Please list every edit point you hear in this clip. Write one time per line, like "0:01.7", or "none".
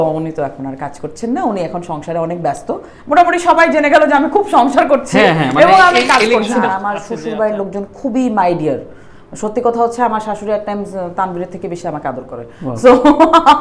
0:06.7